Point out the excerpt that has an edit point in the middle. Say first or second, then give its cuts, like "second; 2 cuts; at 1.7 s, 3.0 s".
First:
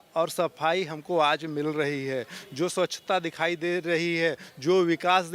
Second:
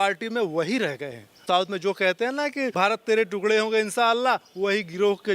second; 2 cuts; at 1.4 s, 2.7 s